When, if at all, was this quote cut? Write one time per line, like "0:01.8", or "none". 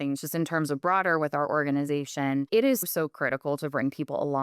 0:02.5